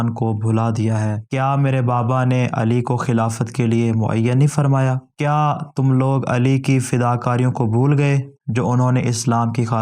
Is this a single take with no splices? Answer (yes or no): no